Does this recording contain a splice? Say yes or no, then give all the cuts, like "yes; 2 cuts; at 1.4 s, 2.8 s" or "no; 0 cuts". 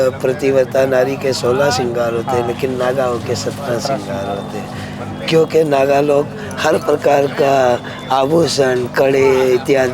no; 0 cuts